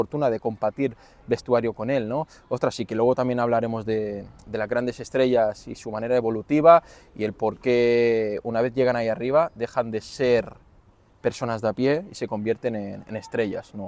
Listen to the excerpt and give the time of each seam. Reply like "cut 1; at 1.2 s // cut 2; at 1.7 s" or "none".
none